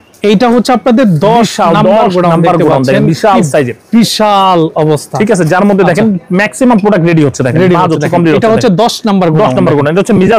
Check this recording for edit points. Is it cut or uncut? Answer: uncut